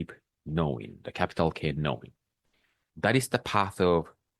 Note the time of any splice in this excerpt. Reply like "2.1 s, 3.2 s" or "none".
2.9 s